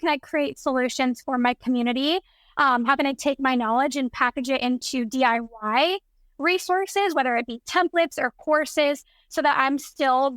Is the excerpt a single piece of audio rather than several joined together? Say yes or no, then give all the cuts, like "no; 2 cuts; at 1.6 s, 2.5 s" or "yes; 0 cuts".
yes; 0 cuts